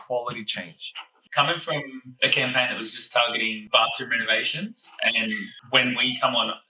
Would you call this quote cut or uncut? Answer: cut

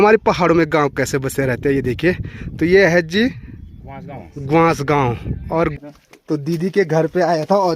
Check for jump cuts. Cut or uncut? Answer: cut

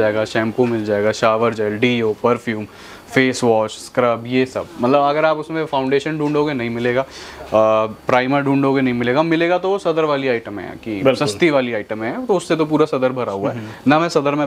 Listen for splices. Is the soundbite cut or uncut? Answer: uncut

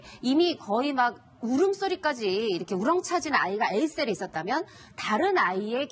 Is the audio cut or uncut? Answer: uncut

